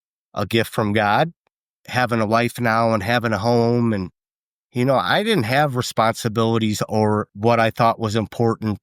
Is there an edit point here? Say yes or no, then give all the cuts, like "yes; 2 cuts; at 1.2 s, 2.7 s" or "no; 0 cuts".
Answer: yes; 2 cuts; at 1.7 s, 7.3 s